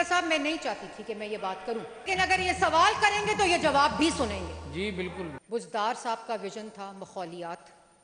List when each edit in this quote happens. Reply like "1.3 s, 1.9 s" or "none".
2.1 s, 5.4 s